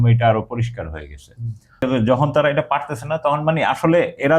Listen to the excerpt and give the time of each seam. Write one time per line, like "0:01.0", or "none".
0:01.8